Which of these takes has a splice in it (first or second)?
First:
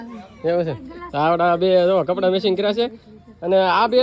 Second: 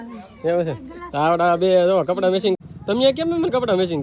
second